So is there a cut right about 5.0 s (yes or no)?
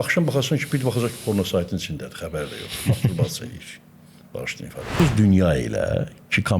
yes